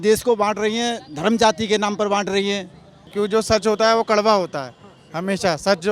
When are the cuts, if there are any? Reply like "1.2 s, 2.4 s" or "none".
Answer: 3.1 s